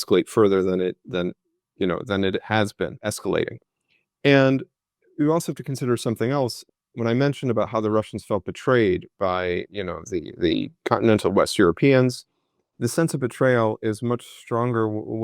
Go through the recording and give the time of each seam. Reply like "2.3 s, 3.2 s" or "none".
3.1 s, 6.7 s